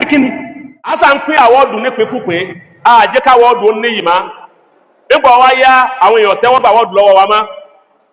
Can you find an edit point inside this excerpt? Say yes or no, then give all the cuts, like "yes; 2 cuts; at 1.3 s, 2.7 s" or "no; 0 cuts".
yes; 1 cut; at 0.9 s